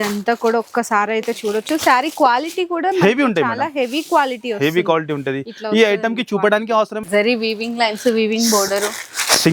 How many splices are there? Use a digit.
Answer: 1